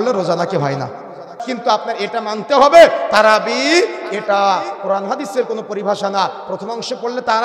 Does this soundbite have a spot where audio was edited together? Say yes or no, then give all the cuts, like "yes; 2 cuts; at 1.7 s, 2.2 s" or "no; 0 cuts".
yes; 1 cut; at 1.4 s